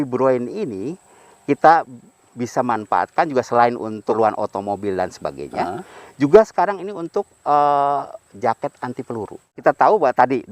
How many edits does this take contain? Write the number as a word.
two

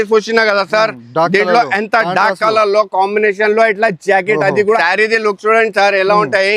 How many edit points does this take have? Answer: one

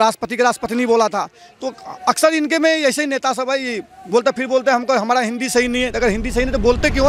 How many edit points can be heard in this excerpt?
zero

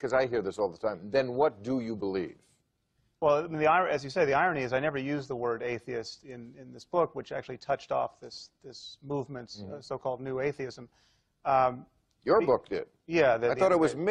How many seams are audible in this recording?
one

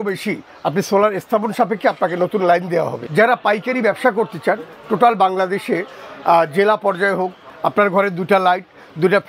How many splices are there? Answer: two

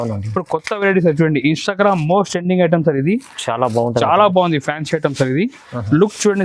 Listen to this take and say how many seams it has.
zero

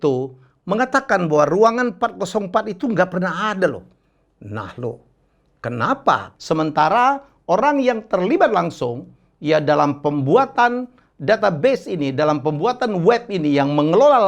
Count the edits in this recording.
one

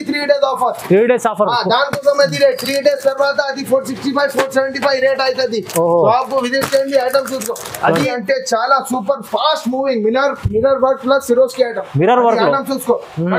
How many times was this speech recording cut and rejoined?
one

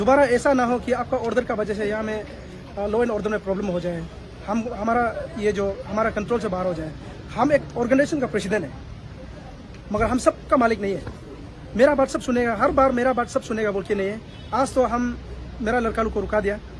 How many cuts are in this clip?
zero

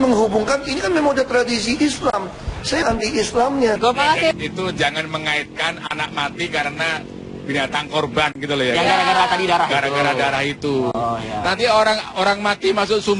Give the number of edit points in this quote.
two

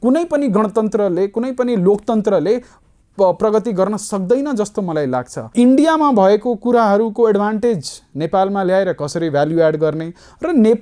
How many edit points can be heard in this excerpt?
one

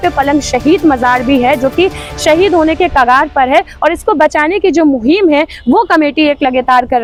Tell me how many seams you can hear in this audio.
zero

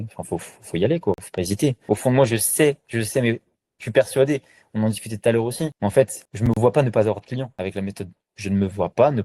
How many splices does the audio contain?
one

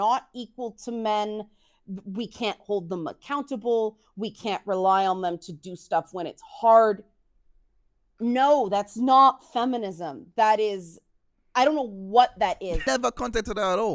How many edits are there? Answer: one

